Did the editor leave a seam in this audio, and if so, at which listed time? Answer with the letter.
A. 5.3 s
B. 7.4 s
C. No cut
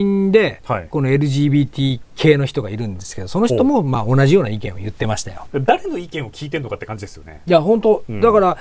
A